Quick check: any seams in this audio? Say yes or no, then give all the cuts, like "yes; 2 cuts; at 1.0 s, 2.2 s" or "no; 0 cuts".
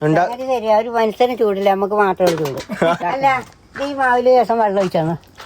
yes; 1 cut; at 3.0 s